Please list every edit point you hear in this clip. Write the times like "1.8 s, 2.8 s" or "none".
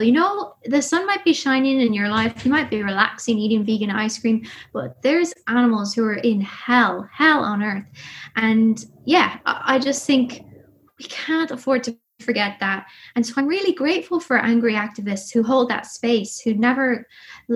none